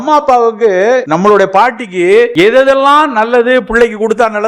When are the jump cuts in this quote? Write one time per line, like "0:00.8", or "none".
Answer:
0:01.1
0:02.3